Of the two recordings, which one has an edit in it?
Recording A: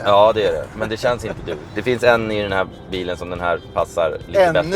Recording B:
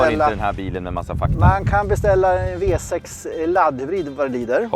A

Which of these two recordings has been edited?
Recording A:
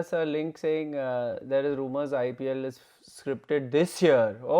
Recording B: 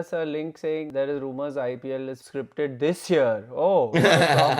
B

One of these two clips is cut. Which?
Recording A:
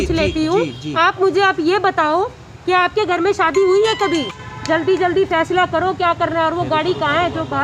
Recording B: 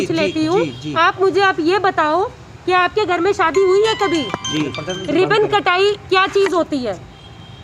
A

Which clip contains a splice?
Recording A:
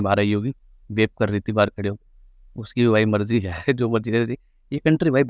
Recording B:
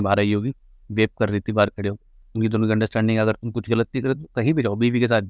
B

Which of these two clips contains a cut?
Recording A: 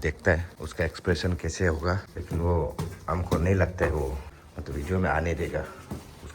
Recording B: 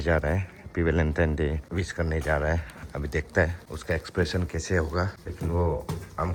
A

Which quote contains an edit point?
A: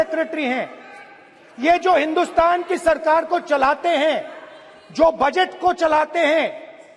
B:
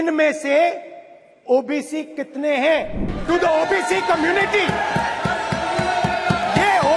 B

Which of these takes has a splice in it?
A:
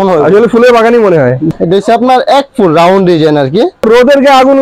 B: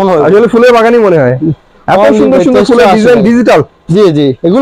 A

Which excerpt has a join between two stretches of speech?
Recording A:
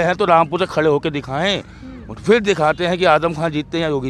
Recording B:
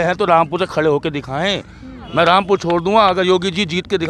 B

